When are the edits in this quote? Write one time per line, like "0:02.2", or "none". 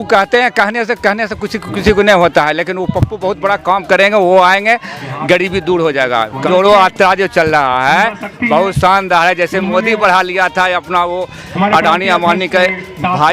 0:06.4